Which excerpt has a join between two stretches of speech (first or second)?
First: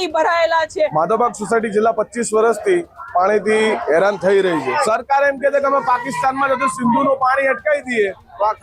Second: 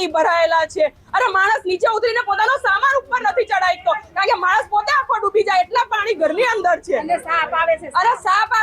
first